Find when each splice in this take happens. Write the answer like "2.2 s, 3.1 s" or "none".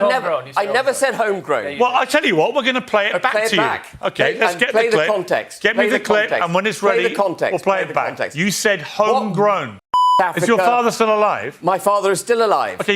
10.1 s